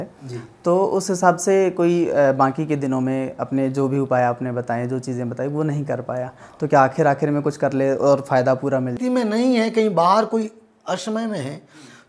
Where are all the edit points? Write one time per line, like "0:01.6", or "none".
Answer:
0:08.9